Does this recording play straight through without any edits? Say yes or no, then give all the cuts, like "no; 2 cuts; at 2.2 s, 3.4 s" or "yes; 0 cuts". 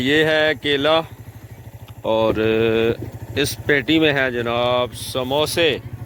yes; 0 cuts